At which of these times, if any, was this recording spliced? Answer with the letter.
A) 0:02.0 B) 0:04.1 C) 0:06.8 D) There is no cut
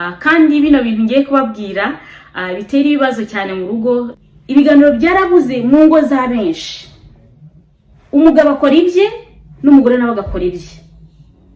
B